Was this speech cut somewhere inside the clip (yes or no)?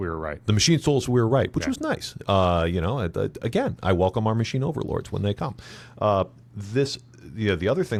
no